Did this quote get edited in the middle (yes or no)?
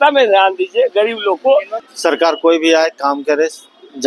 yes